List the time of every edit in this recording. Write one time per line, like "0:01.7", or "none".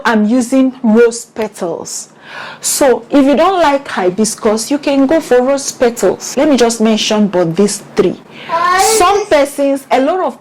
0:06.2